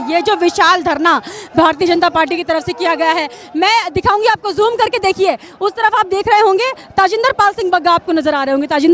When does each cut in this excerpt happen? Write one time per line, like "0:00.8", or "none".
none